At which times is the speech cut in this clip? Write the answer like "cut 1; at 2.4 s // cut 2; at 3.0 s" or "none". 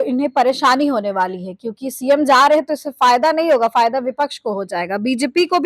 none